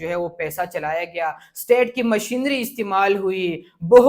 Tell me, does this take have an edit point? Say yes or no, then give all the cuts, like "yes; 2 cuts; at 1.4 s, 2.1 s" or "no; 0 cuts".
no; 0 cuts